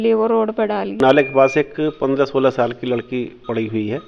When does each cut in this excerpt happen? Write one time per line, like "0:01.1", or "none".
0:00.9